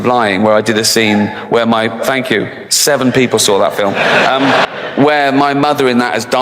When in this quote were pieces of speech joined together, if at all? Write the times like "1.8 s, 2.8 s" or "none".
4.7 s